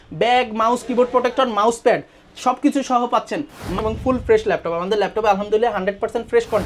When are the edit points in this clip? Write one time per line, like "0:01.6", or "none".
0:03.8